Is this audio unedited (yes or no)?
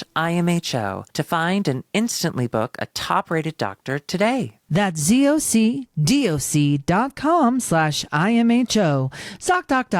yes